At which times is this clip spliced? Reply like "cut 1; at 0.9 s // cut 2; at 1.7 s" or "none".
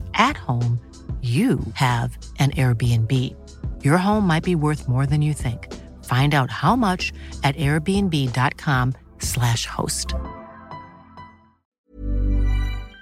cut 1; at 11.6 s